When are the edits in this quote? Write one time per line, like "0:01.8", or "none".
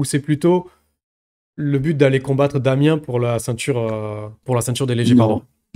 0:04.3

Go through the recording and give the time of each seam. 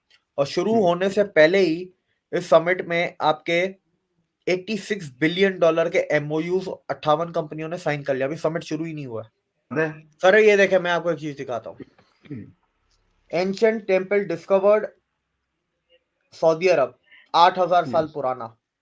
0:09.7

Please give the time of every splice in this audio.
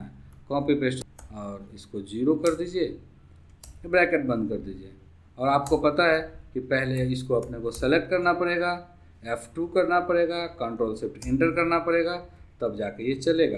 0:01.0

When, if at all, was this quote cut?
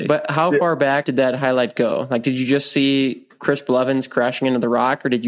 0:01.1

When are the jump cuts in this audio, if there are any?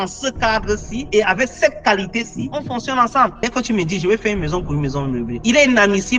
0:03.4

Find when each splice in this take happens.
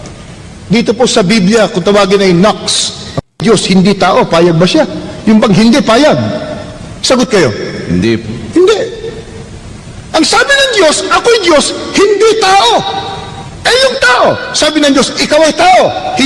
0:03.3

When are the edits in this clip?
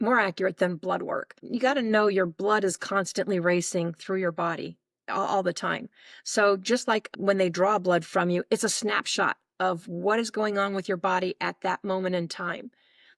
0:01.4
0:07.1

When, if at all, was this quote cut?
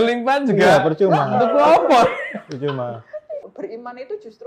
0:03.4

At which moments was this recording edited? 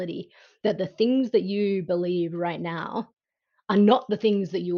none

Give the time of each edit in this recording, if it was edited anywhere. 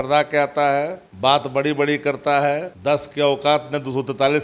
0:01.0
0:02.7

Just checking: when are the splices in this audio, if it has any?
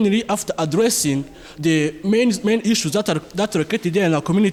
none

